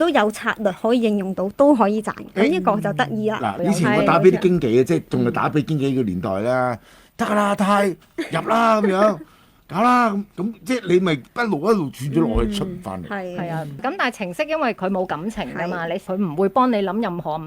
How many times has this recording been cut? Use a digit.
3